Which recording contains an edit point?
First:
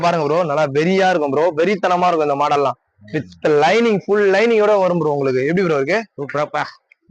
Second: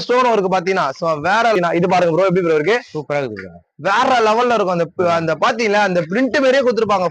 second; 1 cut; at 1.6 s

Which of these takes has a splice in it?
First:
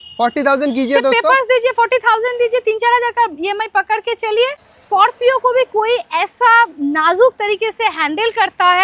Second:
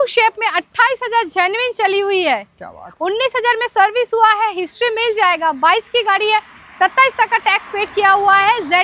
first; 1 cut; at 4.7 s

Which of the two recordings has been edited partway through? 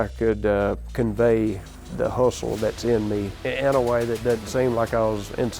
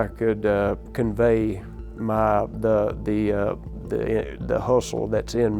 first; 2 cuts; at 1.8 s, 3.4 s

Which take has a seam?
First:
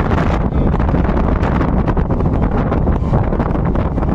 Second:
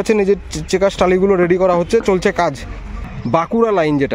second; 1 cut; at 2.9 s

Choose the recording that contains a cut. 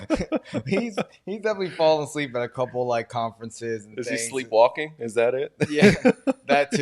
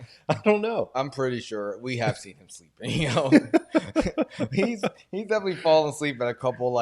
second; 1 cut; at 0.9 s

